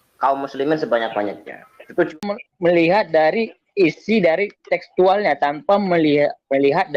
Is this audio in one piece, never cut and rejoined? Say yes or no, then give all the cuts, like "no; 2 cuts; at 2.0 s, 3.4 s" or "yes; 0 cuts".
no; 1 cut; at 2.1 s